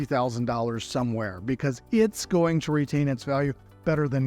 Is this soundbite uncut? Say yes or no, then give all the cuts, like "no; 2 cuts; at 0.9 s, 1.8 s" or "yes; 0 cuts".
yes; 0 cuts